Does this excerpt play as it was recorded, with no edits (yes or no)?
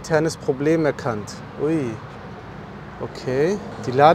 yes